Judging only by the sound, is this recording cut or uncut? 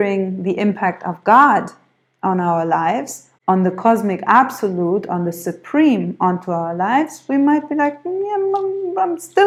uncut